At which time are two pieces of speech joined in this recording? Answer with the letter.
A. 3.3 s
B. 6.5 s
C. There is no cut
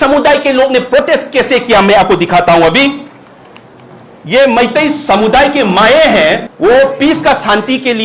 B